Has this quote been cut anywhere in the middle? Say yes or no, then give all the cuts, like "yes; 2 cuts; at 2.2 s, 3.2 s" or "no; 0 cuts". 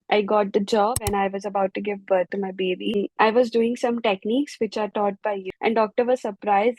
yes; 3 cuts; at 0.9 s, 3.0 s, 5.4 s